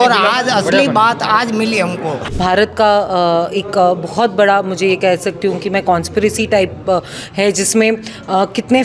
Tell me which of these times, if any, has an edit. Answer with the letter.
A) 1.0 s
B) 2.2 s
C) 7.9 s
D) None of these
B